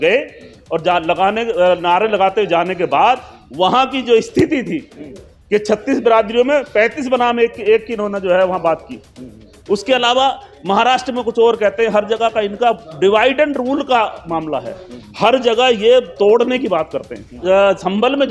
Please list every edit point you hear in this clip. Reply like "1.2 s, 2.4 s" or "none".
4.9 s, 17.4 s